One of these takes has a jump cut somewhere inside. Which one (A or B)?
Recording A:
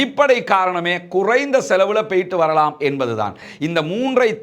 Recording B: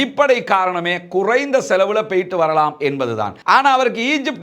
A